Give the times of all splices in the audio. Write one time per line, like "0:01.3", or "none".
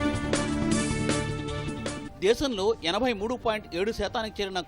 0:01.9